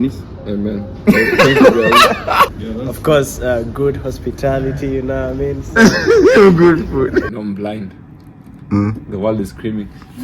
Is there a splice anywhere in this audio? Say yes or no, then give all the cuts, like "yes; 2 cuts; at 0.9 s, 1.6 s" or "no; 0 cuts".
yes; 2 cuts; at 2.6 s, 7.4 s